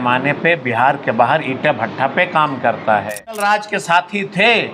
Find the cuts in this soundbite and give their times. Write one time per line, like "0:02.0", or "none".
0:03.4

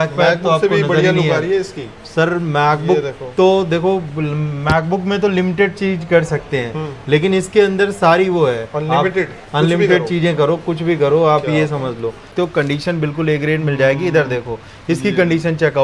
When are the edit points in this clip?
0:12.3

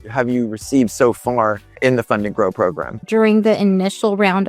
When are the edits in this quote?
0:01.8
0:03.0

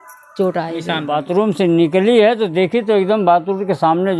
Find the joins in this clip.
0:01.2

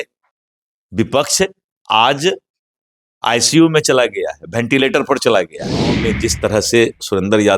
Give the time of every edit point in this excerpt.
0:06.1

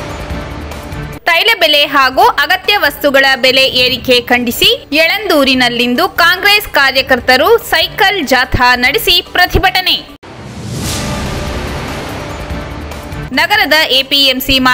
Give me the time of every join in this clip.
0:01.1

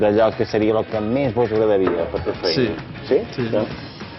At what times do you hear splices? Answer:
none

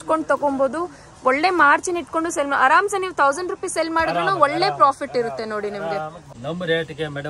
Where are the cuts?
0:06.2

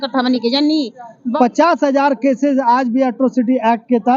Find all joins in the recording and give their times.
0:01.2

